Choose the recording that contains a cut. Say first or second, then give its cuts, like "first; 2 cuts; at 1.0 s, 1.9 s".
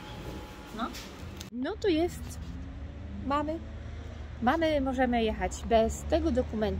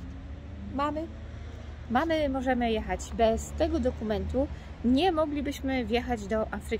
first; 1 cut; at 1.6 s